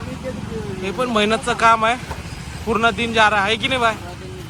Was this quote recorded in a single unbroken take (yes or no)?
yes